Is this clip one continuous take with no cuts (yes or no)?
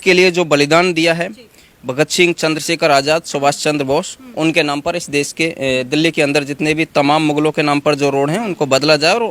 yes